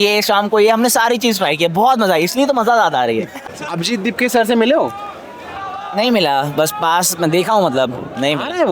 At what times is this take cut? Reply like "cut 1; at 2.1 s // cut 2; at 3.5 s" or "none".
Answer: cut 1; at 3.6 s